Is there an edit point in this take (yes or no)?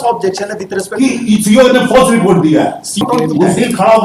yes